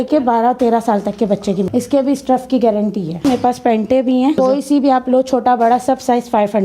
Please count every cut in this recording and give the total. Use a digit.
3